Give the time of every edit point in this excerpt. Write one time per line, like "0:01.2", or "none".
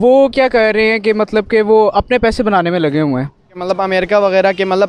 0:03.5